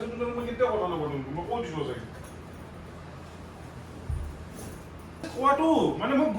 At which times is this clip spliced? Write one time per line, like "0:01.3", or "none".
0:05.3